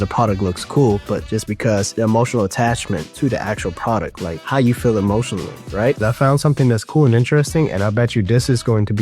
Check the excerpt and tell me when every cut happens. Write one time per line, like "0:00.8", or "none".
0:06.0